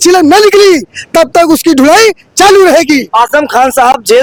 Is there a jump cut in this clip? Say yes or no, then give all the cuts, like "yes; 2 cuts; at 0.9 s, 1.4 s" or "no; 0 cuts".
no; 0 cuts